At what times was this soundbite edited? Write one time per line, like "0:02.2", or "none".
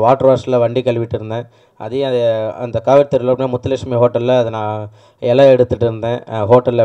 none